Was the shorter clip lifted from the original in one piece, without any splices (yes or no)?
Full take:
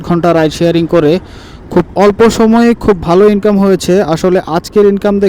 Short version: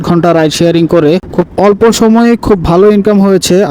no